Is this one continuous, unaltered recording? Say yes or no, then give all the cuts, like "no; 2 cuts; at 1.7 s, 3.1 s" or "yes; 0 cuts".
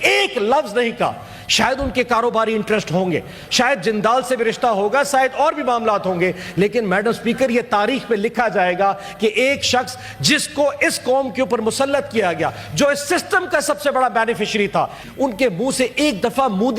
no; 1 cut; at 15.0 s